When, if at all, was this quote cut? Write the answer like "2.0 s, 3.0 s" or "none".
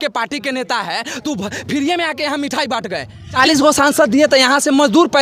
3.4 s